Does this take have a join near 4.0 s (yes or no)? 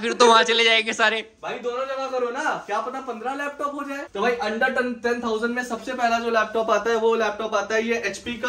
yes